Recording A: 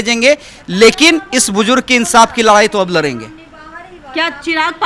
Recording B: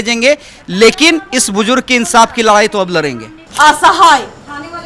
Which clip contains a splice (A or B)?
B